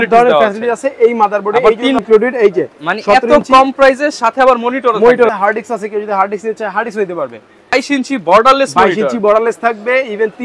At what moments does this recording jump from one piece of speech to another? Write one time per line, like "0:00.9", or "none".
0:02.0
0:05.3
0:07.7